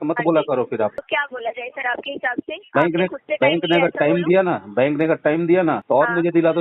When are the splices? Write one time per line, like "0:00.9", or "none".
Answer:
0:01.0
0:05.8